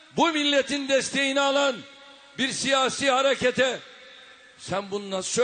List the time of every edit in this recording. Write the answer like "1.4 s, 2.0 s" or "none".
3.8 s